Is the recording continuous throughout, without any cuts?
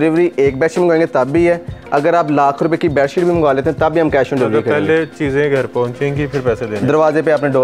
yes; 0 cuts

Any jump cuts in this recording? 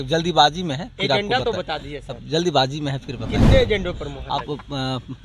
no; 0 cuts

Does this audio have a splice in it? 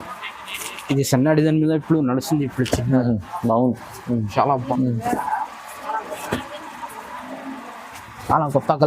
yes; 1 cut; at 4.7 s

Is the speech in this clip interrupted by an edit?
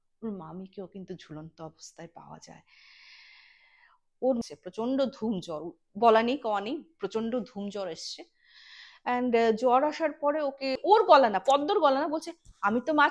yes; 2 cuts; at 4.4 s, 10.8 s

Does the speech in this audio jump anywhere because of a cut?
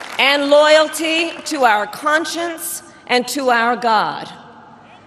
no; 0 cuts

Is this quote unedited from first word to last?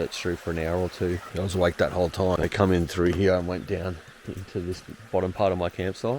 no; 2 cuts; at 1.3 s, 2.4 s

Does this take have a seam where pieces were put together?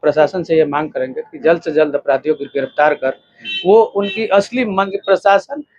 yes; 1 cut; at 4.9 s

